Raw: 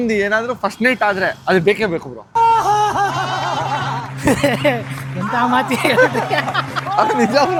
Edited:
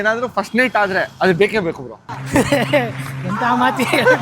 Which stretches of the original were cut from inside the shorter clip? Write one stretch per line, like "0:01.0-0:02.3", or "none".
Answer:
0:02.2-0:03.9